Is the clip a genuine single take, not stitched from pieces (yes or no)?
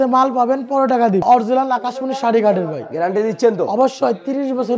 no